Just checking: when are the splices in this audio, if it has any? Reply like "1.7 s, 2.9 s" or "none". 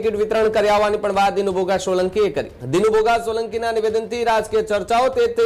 2.5 s